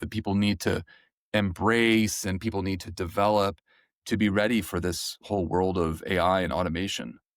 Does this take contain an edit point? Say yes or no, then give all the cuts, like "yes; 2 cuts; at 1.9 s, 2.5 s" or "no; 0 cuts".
no; 0 cuts